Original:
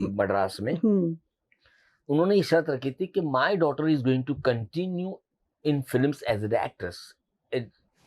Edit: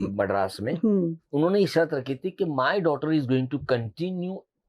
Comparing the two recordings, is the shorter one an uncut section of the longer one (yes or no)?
no